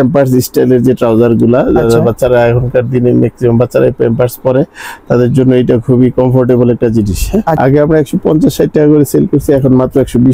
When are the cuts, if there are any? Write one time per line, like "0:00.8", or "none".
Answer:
0:07.6